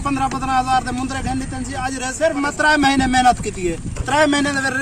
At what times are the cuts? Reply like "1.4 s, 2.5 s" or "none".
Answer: 2.1 s